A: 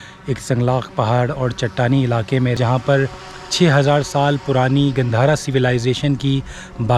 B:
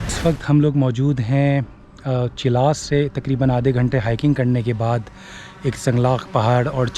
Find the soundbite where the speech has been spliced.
A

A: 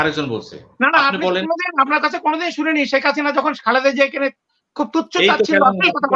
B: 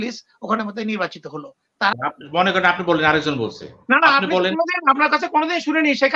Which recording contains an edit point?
B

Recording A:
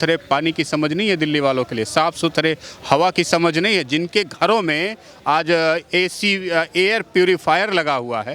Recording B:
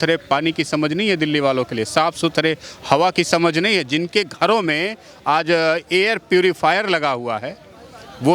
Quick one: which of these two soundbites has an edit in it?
B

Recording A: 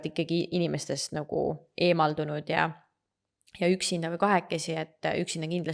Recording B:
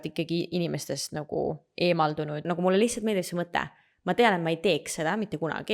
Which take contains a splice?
B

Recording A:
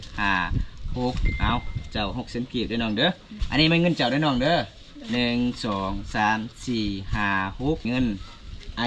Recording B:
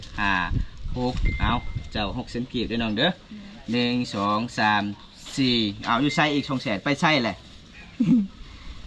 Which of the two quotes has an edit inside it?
A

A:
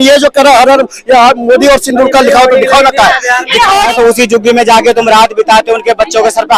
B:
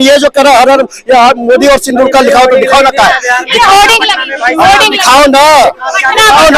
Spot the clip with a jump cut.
A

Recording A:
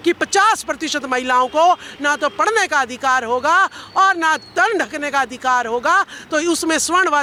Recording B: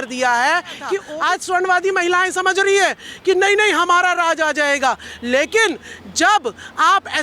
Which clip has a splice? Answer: B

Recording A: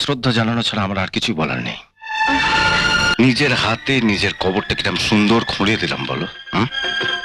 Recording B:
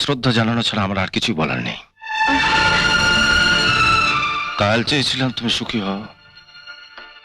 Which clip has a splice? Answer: A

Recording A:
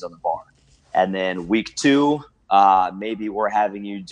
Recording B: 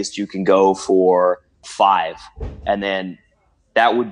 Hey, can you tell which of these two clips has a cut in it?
B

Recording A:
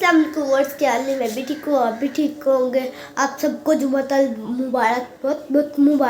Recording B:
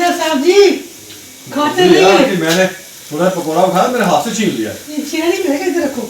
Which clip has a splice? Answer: B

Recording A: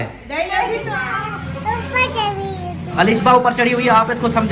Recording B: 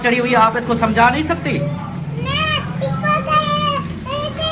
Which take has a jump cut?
A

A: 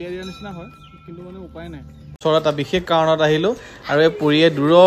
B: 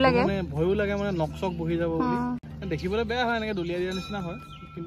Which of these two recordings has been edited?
A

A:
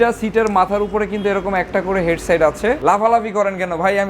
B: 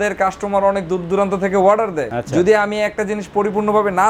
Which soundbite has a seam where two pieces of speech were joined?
A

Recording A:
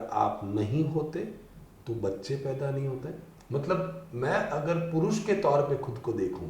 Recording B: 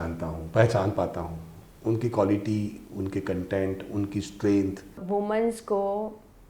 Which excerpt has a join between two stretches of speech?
B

